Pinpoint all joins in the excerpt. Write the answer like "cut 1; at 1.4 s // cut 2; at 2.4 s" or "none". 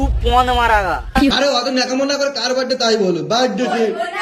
none